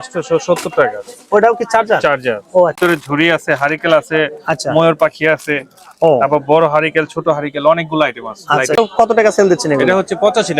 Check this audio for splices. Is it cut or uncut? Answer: cut